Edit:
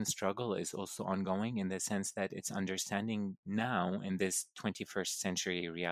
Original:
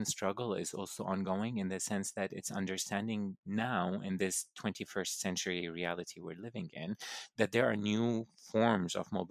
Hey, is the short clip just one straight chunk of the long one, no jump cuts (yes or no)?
yes